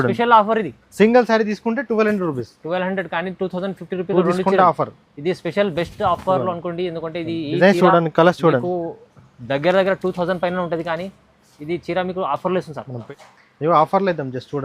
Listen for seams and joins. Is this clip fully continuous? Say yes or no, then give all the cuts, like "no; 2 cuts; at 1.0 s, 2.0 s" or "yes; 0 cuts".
no; 1 cut; at 13.0 s